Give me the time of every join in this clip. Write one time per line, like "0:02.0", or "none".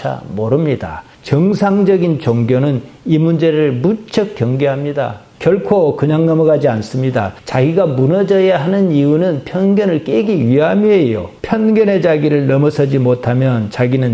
0:05.2
0:11.3